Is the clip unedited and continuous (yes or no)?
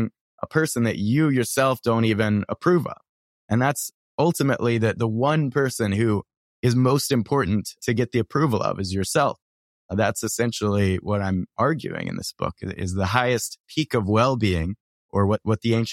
no